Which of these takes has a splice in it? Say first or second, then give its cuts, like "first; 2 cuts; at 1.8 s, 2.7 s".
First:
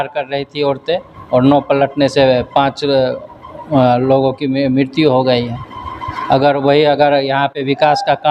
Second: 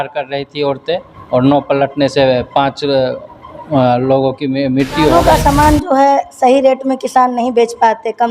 second; 1 cut; at 5.1 s